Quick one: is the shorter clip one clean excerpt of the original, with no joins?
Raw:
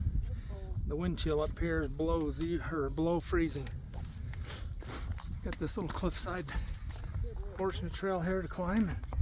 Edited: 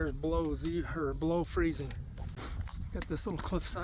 no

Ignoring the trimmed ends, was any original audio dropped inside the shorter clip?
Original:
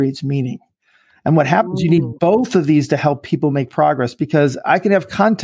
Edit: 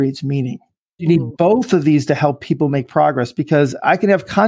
yes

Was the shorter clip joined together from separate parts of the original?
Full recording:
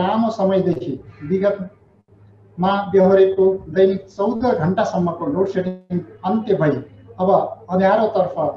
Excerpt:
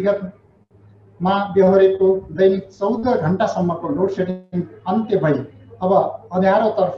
no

